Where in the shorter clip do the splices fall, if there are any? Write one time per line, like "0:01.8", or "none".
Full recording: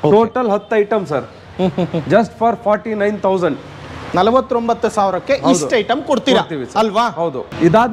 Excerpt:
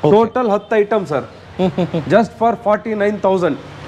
none